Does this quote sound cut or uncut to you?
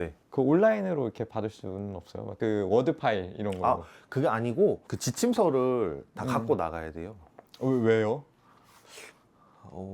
uncut